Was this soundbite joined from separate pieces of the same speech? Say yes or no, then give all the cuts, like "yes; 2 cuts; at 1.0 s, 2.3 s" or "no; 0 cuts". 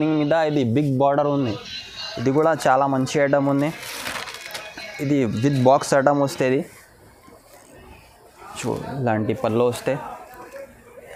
no; 0 cuts